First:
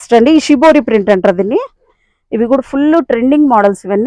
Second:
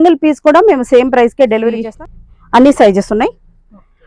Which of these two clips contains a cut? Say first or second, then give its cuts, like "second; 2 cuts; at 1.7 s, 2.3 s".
second; 1 cut; at 1.9 s